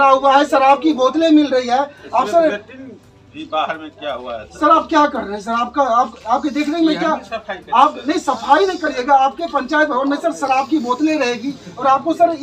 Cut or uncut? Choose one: uncut